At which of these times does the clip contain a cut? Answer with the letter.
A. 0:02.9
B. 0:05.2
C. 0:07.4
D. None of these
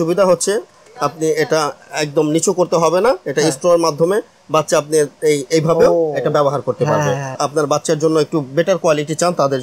C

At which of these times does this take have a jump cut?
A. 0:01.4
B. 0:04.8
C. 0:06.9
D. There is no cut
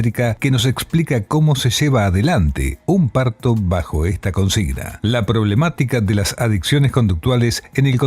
B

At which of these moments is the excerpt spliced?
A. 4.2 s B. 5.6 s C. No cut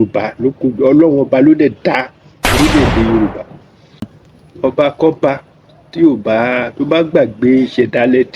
A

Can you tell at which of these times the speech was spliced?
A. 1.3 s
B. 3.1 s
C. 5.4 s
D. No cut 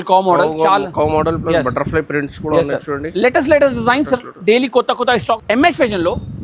C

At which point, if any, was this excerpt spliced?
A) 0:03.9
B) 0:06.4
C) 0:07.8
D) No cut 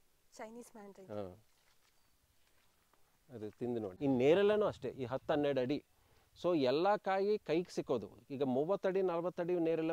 A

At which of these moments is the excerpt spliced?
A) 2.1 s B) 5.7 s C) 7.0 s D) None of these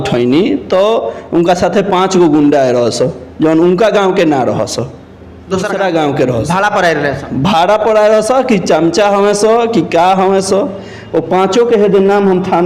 B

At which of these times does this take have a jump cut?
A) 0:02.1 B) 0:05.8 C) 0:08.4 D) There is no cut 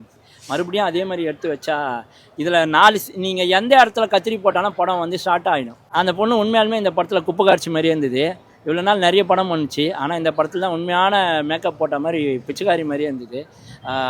B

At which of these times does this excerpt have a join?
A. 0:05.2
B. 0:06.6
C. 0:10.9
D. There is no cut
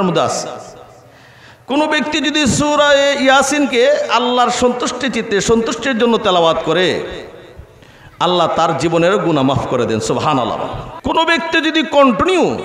C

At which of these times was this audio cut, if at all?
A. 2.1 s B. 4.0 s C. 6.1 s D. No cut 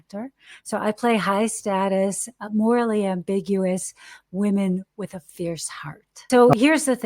C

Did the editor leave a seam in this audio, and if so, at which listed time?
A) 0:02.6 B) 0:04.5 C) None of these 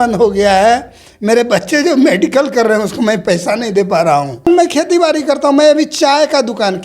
B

